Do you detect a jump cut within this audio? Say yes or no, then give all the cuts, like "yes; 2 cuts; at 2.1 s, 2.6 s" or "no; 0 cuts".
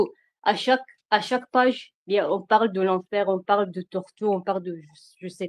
no; 0 cuts